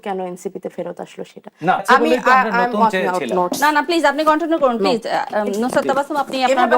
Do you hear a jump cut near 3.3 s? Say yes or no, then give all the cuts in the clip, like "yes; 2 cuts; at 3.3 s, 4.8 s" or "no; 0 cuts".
no; 1 cut; at 1.8 s